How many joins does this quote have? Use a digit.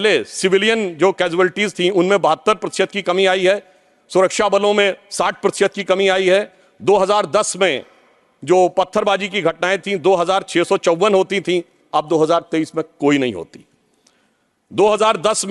0